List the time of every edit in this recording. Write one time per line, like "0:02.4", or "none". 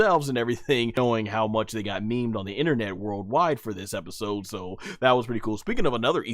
0:01.0